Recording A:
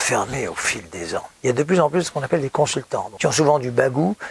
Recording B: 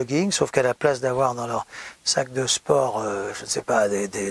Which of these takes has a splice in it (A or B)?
A